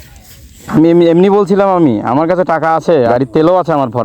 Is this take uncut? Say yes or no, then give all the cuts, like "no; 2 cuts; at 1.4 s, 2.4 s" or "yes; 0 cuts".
no; 1 cut; at 3.1 s